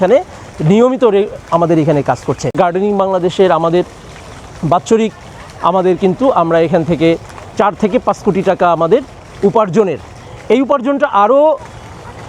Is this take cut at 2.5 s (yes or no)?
yes